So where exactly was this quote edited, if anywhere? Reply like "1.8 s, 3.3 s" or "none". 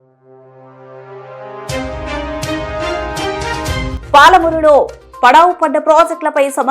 3.9 s